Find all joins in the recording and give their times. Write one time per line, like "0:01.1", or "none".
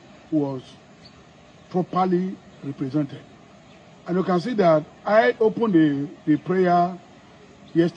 none